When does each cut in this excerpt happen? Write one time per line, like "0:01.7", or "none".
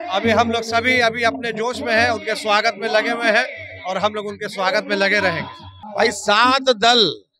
0:05.8